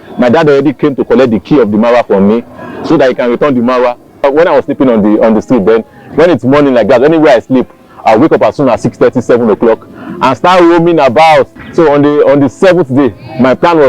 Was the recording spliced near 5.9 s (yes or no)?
no